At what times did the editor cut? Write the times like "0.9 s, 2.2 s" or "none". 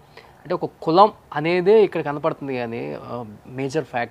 1.3 s